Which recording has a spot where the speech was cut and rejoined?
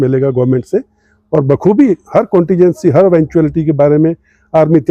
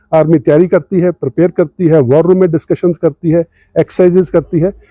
second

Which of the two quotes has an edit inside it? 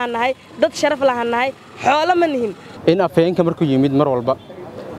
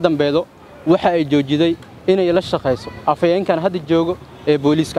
first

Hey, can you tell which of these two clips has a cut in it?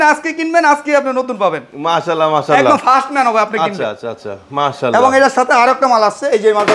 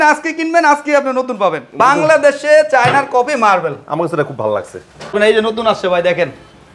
second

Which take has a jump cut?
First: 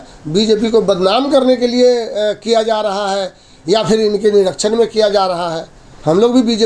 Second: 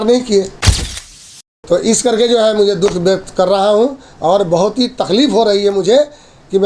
second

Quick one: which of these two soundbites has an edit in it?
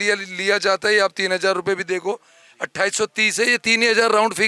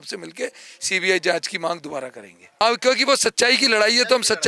second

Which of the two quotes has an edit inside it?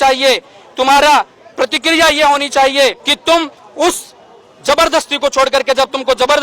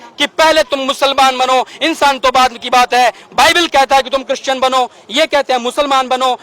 first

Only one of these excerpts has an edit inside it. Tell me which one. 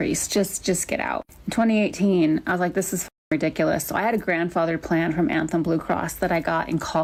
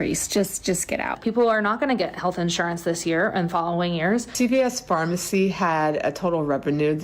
second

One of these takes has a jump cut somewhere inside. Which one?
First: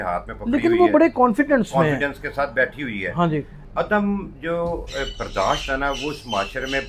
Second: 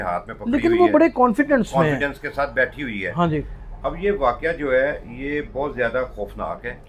first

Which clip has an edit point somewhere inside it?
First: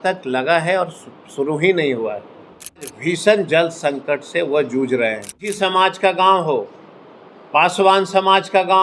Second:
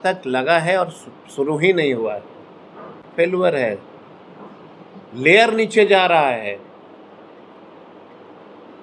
first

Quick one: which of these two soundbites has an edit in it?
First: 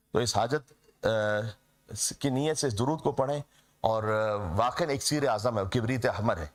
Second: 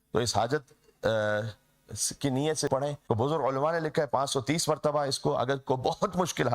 second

